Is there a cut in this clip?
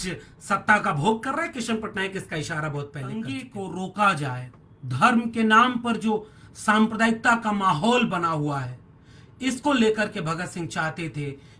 yes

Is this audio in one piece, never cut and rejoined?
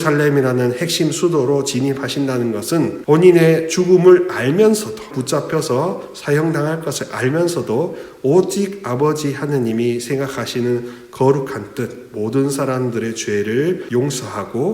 yes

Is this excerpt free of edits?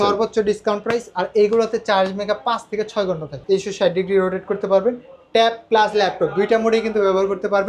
no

